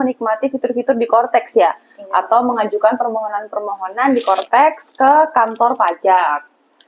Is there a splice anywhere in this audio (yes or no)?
no